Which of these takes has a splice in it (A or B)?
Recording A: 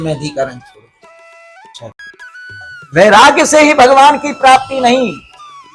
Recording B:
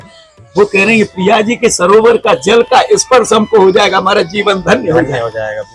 A